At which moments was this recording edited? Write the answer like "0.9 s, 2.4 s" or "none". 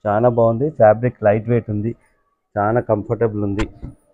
none